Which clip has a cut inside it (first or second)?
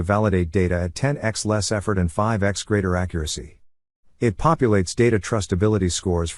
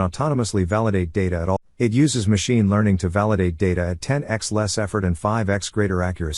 second